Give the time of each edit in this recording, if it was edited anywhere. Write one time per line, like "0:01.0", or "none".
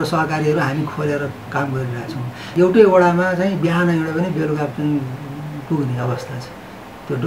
0:02.4